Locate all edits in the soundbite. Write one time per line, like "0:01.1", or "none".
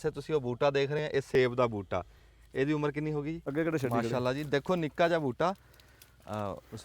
0:03.4